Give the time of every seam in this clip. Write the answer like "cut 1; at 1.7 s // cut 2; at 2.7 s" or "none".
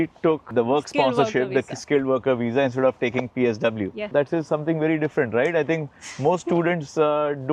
none